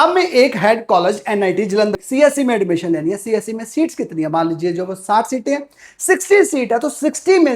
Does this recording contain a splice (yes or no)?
yes